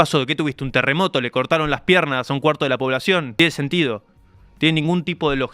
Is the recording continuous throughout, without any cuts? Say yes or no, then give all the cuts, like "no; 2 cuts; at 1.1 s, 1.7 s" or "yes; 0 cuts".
no; 1 cut; at 3.3 s